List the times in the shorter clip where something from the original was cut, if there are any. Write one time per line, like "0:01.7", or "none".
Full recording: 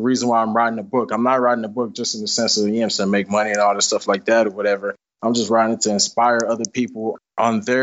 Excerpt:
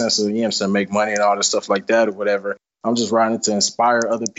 none